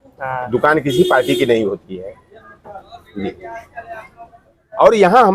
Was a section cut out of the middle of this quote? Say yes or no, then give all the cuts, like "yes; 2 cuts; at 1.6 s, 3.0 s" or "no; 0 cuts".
no; 0 cuts